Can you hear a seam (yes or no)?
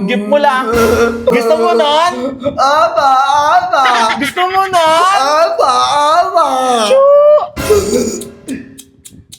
yes